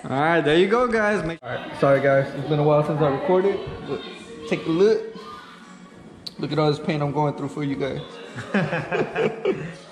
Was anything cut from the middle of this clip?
yes; 1 cut; at 1.3 s

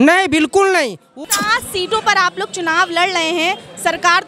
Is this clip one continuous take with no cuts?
no; 1 cut; at 1.1 s

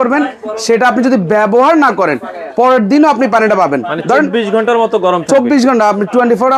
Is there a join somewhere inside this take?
no; 0 cuts

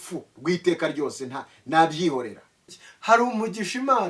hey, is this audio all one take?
no; 1 cut; at 2.9 s

